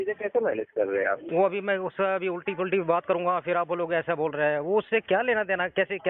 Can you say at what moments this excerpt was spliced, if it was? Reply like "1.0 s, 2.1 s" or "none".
1.2 s